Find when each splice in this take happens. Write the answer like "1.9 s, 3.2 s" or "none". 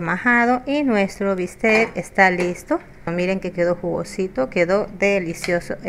3.0 s